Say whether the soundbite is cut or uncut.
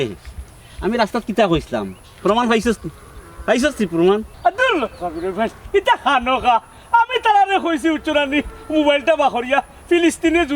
cut